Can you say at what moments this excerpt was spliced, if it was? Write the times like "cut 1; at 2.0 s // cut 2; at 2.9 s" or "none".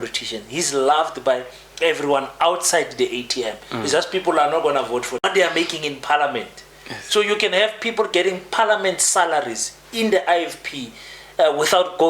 cut 1; at 5.2 s